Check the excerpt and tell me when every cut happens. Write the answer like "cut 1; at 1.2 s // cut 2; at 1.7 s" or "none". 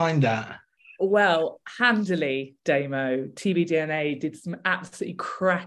none